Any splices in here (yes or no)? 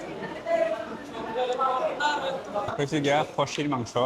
yes